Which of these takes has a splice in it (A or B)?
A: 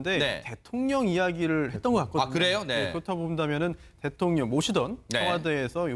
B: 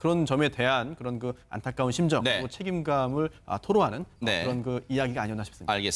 B